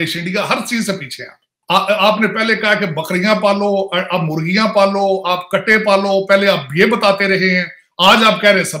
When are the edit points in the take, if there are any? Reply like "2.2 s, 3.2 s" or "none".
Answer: 1.5 s